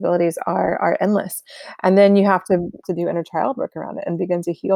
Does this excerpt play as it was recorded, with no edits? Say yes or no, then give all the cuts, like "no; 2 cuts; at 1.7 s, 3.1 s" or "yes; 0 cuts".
no; 1 cut; at 2.8 s